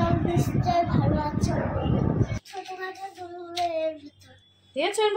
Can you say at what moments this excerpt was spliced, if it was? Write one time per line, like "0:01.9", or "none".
0:02.5